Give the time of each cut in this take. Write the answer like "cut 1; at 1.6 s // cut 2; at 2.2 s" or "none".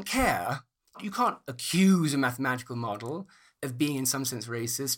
cut 1; at 1.0 s